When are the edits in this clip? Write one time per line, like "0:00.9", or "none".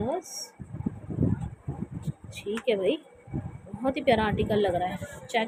none